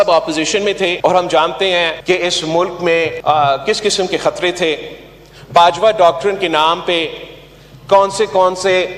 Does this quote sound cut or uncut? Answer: cut